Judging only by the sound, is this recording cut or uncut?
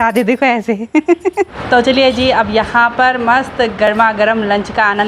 cut